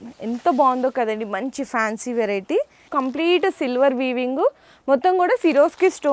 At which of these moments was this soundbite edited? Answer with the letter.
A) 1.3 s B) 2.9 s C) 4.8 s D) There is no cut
B